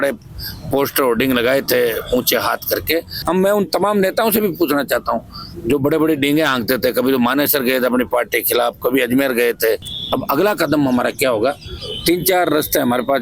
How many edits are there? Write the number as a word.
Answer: two